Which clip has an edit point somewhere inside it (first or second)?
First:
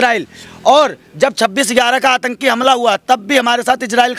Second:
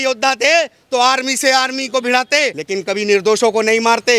second